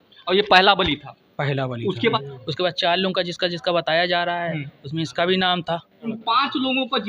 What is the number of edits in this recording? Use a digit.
2